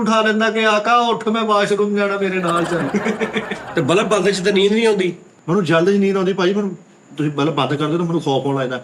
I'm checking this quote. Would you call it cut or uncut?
cut